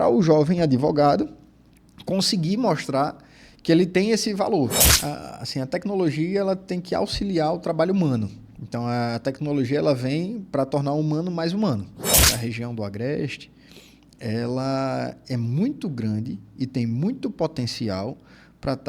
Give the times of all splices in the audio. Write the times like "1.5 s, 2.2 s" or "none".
4.8 s, 12.2 s